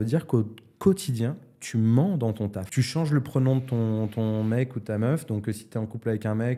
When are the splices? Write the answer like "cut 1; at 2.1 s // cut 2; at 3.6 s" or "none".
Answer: none